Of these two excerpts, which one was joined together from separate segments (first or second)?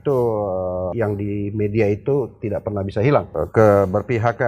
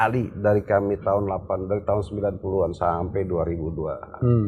first